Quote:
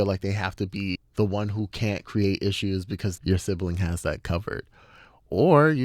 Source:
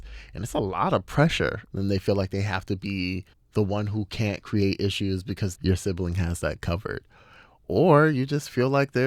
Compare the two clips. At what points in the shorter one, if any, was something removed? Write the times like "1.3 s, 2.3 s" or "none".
1.0 s